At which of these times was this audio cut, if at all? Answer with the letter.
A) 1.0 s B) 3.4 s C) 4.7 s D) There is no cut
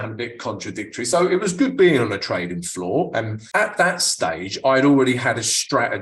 B